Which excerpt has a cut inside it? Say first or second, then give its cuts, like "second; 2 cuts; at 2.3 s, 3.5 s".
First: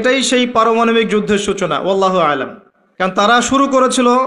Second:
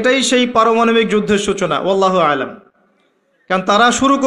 first; 1 cut; at 3.3 s